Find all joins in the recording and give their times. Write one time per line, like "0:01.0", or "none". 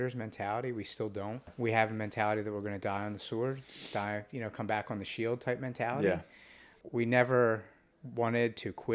0:01.5
0:06.7

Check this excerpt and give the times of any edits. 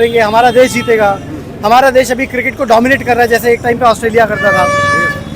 none

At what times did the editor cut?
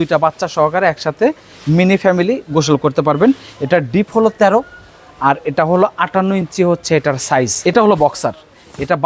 0:07.6

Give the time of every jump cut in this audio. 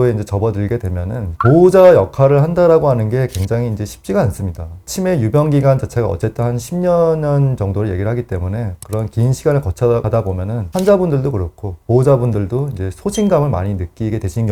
none

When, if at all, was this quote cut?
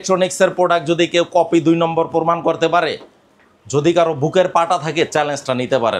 none

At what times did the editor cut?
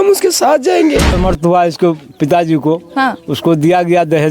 0:01.1

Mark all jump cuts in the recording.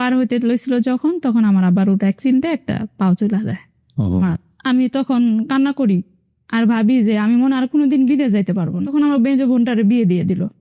0:04.3
0:08.8

